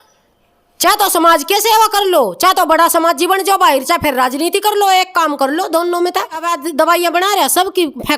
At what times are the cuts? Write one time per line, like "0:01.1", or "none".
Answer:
0:06.5